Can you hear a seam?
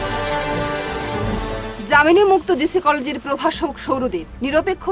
yes; 1 cut; at 1.3 s

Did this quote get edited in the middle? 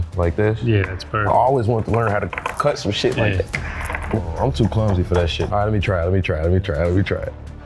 yes; 2 cuts; at 4.2 s, 5.5 s

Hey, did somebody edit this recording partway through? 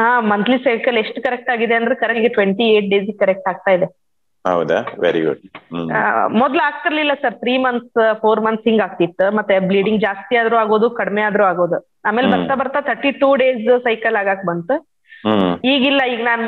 yes; 1 cut; at 2.2 s

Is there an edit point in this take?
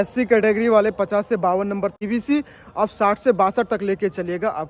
yes; 1 cut; at 2.0 s

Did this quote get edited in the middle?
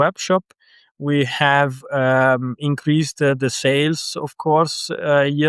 no; 0 cuts

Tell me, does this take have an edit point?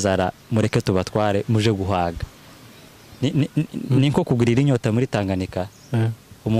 no; 0 cuts

